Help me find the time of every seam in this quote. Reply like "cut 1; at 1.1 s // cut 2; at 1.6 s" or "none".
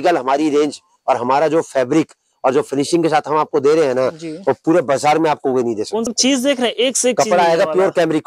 cut 1; at 6.1 s